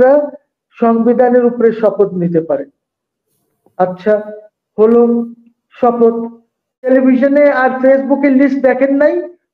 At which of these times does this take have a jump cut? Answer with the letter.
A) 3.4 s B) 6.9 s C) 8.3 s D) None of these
B